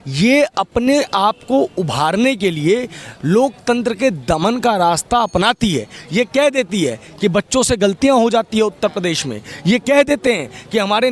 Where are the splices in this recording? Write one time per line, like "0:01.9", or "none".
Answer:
none